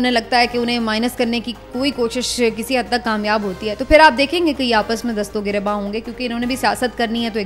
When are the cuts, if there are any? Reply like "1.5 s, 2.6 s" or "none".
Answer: none

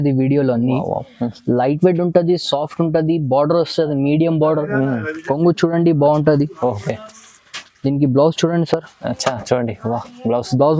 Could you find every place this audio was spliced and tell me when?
none

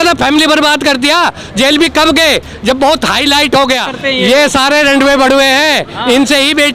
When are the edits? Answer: 4.0 s

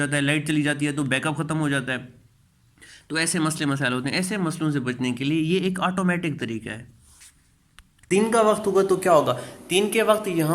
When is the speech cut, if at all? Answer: 8.0 s

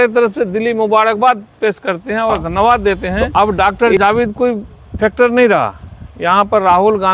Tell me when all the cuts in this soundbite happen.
3.2 s

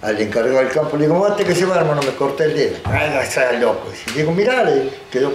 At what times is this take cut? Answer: none

